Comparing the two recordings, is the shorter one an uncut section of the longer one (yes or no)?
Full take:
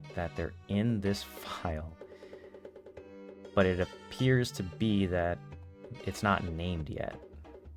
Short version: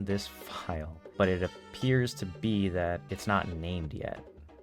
no